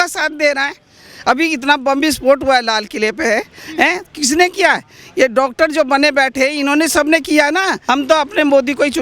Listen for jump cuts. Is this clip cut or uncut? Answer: cut